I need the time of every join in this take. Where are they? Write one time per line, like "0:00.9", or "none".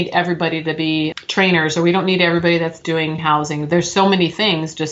0:01.1